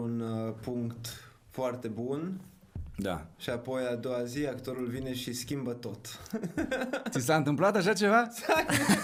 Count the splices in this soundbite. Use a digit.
0